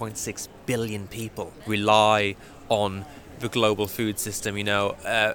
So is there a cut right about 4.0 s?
no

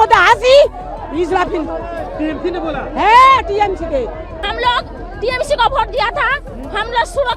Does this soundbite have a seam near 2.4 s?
no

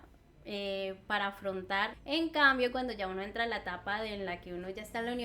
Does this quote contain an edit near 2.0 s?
yes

